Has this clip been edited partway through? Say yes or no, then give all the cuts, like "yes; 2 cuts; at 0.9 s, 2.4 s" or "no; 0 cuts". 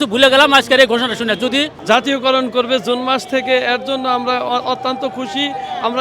yes; 1 cut; at 1.7 s